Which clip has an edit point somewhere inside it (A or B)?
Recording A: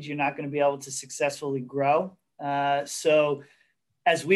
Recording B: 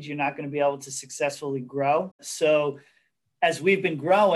B